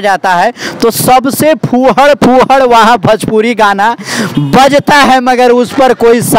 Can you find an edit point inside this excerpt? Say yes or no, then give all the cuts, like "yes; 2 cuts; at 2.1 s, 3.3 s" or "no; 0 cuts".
no; 0 cuts